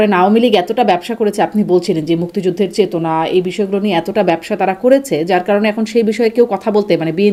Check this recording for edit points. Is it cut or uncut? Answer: uncut